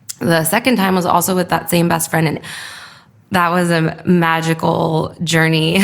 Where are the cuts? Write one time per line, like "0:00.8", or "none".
0:02.4